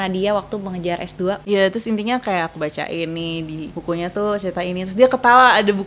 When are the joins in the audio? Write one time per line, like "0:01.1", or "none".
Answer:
0:01.4
0:03.7